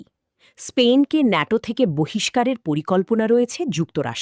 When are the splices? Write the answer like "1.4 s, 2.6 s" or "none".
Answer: none